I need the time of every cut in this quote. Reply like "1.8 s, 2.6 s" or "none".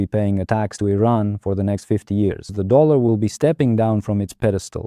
2.5 s